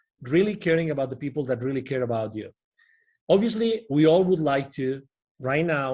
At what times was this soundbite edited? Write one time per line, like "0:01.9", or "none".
none